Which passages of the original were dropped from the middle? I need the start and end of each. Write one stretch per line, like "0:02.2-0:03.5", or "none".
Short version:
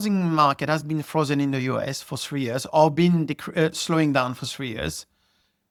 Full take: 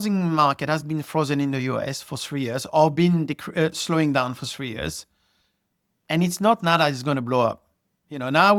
none